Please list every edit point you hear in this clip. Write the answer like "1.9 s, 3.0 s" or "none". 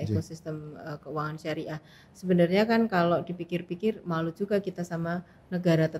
none

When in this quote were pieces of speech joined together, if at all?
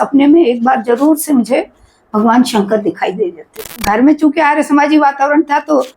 3.7 s

